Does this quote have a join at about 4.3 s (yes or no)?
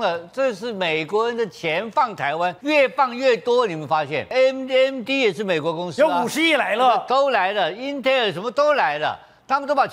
yes